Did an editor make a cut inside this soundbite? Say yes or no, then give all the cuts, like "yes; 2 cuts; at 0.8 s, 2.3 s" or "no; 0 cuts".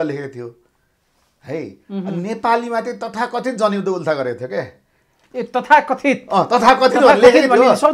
no; 0 cuts